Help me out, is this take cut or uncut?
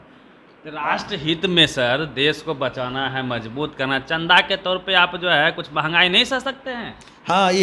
uncut